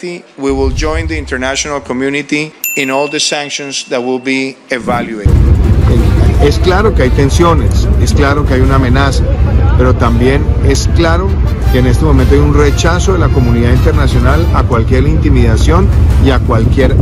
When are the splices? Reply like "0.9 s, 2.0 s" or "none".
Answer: 5.2 s